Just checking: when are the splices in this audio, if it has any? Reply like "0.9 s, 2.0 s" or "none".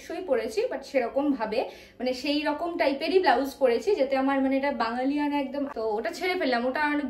5.7 s